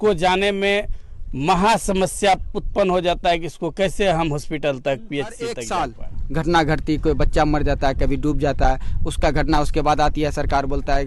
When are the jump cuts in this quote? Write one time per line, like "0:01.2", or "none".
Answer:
0:05.6